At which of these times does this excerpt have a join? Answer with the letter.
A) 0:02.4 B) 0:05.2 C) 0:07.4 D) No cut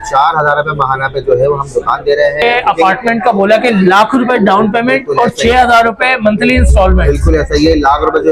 A